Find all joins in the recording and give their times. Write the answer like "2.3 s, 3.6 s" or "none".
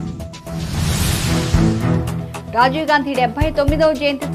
2.3 s